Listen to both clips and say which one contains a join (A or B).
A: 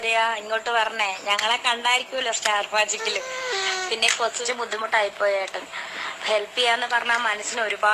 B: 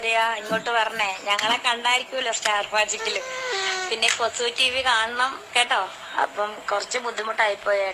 A